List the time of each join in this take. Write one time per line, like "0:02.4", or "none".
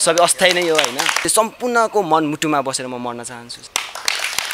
0:01.3
0:03.6